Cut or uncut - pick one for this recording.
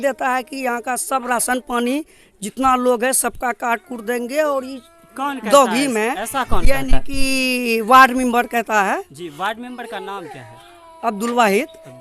uncut